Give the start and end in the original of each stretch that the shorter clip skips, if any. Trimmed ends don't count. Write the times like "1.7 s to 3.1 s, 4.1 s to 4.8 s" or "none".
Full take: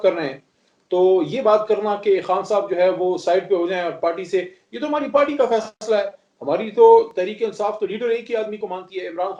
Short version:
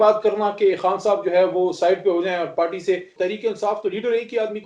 4.6 s to 7.1 s